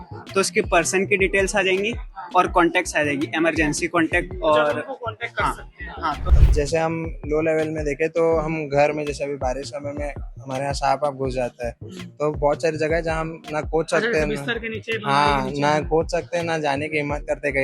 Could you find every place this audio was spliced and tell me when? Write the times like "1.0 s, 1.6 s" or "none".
6.2 s